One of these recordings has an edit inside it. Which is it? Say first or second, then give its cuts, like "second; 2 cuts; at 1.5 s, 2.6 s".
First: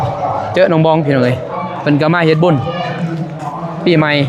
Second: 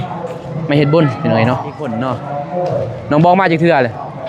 second; 1 cut; at 1.9 s